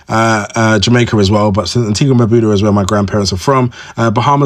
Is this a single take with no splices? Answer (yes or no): yes